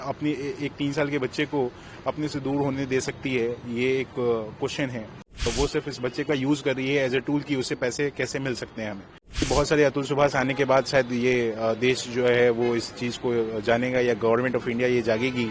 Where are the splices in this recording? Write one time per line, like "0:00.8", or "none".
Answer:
0:05.5
0:09.5